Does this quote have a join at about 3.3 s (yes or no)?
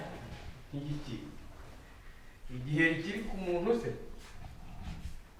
no